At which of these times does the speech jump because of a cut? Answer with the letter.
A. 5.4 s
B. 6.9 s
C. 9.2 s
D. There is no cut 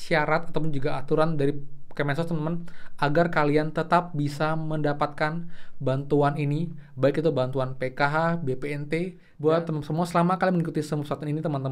C